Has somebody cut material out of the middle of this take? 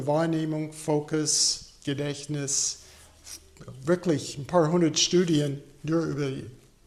no; 0 cuts

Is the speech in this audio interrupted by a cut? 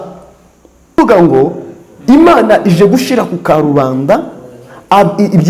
yes; 1 cut; at 1.0 s

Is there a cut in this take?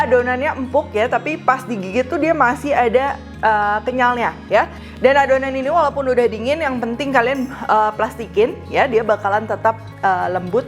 no; 0 cuts

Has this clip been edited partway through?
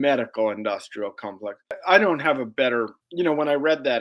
yes; 2 cuts; at 1.7 s, 3.0 s

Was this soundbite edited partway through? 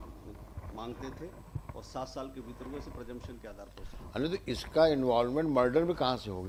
no; 0 cuts

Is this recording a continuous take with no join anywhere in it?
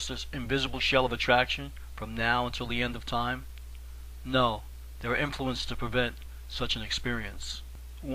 yes; 0 cuts

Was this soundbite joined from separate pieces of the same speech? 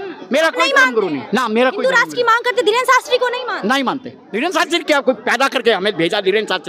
yes; 1 cut; at 4.2 s

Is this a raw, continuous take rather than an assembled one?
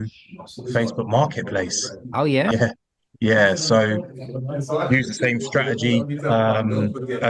no; 1 cut; at 2.5 s

